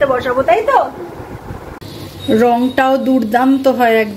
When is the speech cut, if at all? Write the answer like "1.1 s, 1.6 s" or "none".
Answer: 1.6 s